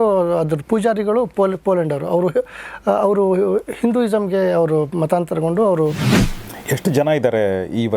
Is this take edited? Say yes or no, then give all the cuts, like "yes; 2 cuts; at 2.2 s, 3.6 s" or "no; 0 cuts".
yes; 1 cut; at 6.4 s